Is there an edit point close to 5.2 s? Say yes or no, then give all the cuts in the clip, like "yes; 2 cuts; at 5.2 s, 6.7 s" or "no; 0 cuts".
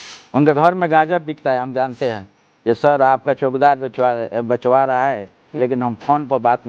no; 1 cut; at 2.5 s